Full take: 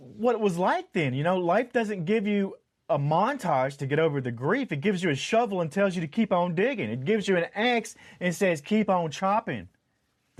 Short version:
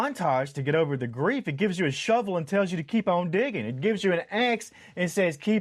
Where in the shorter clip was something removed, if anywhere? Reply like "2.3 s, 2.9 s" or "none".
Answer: none

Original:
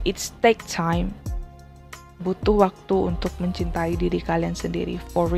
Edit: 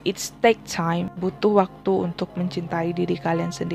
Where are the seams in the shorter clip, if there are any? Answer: 1.1 s

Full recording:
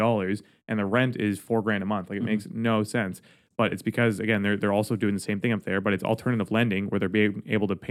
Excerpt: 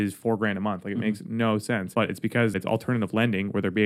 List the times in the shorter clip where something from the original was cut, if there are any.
2.3 s

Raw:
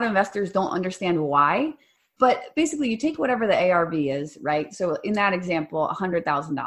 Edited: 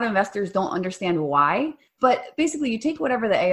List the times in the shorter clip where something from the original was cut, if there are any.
1.8 s

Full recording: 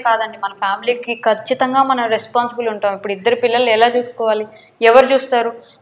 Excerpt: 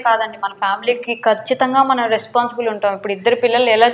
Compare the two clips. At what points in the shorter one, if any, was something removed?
none

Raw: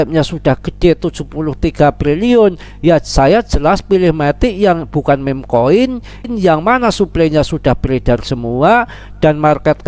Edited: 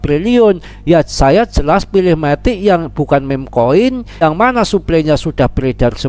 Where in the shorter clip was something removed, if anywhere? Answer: 4.2 s

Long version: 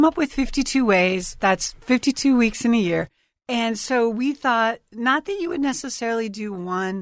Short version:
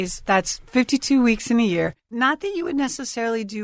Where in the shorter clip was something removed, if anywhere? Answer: 2.0 s

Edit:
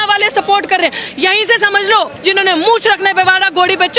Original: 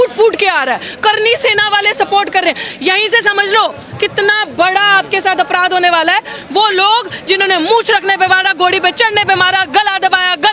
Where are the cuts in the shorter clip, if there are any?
2.1 s

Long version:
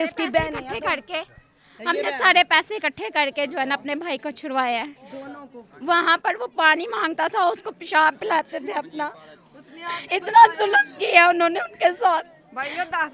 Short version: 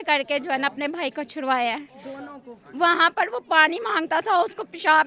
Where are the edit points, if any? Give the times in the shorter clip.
none

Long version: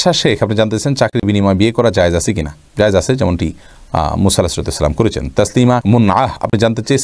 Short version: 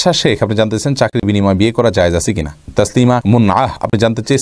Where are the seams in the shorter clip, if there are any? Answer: 2.6 s

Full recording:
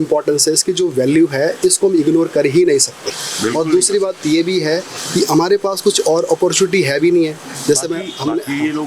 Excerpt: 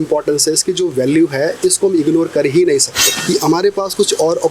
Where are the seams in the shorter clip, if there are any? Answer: 3.1 s

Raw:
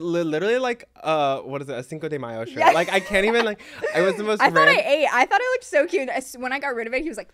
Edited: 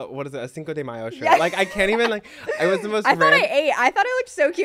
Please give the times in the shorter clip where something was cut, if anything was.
none

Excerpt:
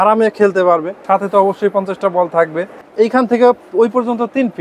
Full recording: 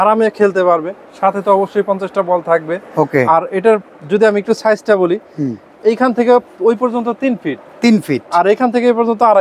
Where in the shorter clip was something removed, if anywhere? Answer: 0.9 s, 2.7 s

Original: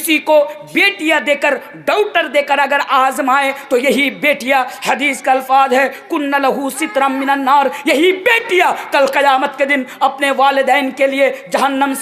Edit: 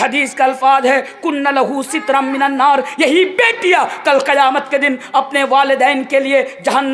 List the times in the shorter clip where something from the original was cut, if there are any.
none

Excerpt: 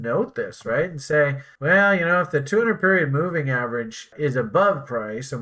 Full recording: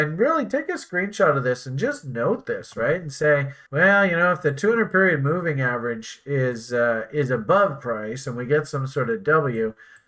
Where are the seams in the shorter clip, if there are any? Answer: 4.1 s

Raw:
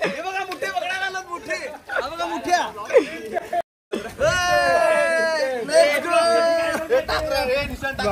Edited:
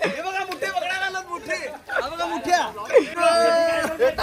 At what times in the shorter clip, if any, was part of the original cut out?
3.1 s

